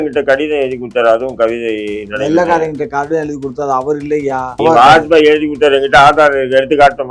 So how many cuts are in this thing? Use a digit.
1